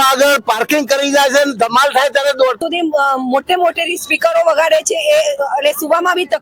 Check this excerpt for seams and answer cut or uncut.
cut